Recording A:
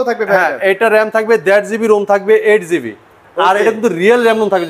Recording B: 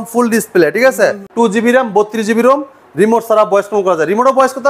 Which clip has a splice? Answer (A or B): B